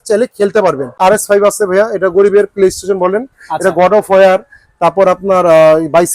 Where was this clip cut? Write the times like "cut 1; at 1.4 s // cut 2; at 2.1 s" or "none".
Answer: cut 1; at 1.0 s

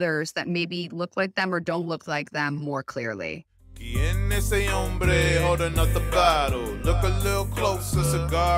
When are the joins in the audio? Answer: cut 1; at 3.8 s

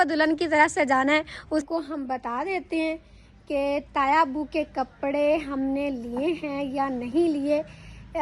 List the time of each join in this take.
cut 1; at 1.7 s

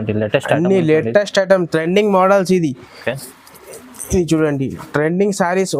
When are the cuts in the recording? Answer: none

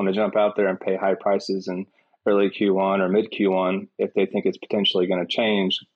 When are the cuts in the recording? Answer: none

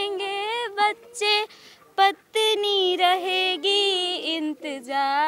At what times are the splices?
none

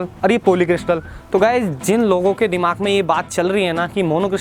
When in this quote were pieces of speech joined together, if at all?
none

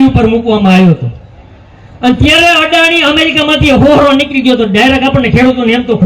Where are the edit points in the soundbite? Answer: none

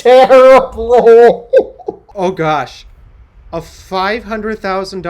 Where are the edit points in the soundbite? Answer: cut 1; at 2.1 s

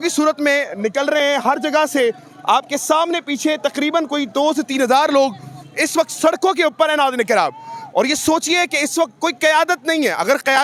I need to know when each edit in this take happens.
none

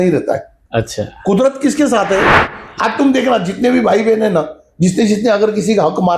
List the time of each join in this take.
cut 1; at 2.4 s

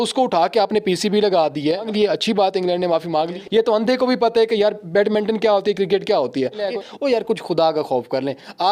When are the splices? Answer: cut 1; at 1.9 s // cut 2; at 3.4 s // cut 3; at 6.6 s

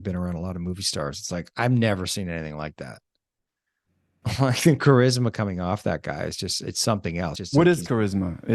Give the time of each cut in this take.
cut 1; at 7.3 s

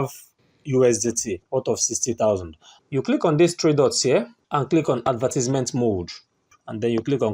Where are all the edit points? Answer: cut 1; at 1.4 s // cut 2; at 2.7 s

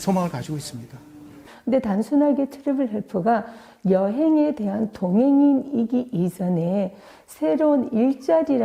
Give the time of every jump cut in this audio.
cut 1; at 1.5 s

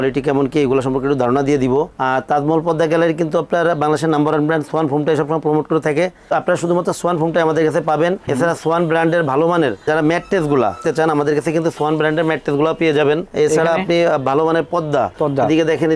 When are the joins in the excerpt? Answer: none

